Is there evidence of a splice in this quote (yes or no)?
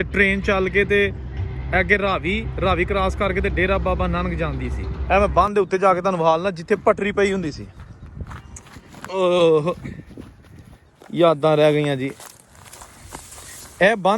yes